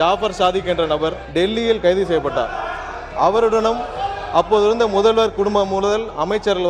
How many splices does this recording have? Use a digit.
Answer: 1